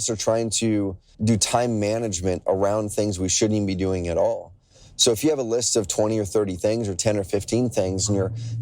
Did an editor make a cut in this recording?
yes; 1 cut; at 1.1 s

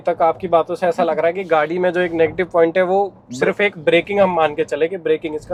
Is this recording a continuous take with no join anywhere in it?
yes; 0 cuts

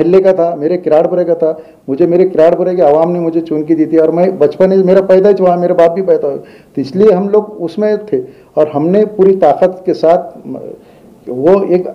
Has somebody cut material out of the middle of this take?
no; 0 cuts

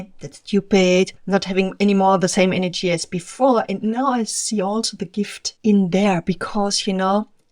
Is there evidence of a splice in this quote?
yes; 1 cut; at 5.4 s

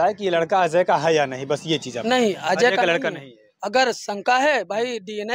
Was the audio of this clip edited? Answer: no; 0 cuts

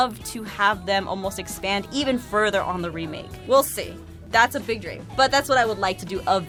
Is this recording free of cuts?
yes; 0 cuts

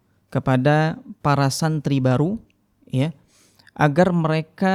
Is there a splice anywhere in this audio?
no; 0 cuts

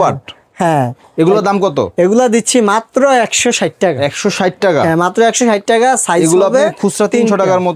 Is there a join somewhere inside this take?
no; 0 cuts

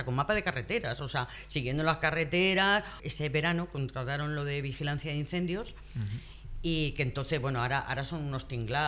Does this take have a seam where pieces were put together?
yes; 1 cut; at 3.0 s

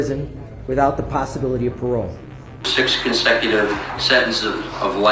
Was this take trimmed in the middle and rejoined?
yes; 1 cut; at 2.7 s

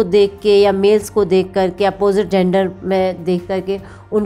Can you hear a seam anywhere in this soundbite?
no; 0 cuts

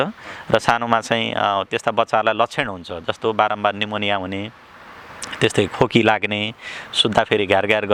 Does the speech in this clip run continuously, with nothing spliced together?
yes; 0 cuts

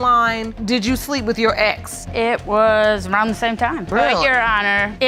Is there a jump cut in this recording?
no; 0 cuts

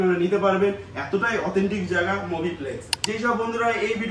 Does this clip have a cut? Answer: yes; 1 cut; at 2.9 s

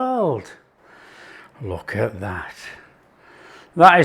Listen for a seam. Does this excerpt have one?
no; 0 cuts

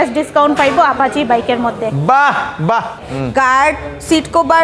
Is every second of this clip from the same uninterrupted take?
no; 1 cut; at 3.0 s

